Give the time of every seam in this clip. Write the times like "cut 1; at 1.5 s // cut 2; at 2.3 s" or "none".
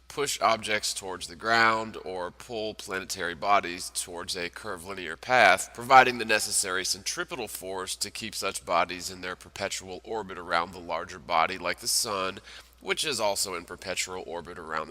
cut 1; at 8.6 s